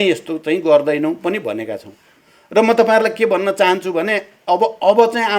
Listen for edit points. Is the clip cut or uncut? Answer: uncut